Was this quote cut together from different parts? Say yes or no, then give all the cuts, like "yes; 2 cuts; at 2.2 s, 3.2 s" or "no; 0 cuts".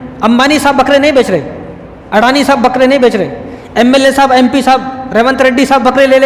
no; 0 cuts